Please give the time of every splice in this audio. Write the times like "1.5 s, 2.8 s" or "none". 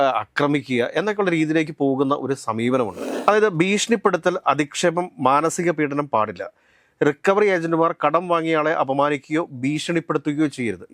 3.0 s